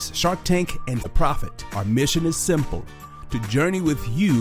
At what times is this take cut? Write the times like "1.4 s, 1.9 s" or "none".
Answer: 1.1 s